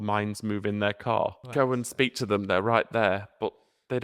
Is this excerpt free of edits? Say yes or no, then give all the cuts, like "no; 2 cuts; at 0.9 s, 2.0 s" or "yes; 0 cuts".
no; 1 cut; at 1.4 s